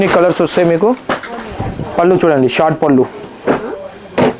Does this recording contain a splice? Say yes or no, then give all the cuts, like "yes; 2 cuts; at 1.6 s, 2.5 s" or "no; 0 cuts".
no; 0 cuts